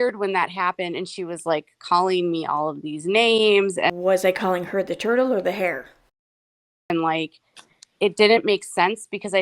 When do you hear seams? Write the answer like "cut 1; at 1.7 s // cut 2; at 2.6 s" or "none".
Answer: none